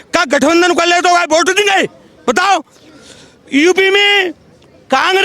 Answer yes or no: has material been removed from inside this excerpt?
no